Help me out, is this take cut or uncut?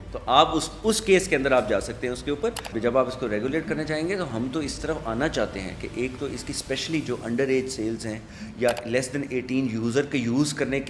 cut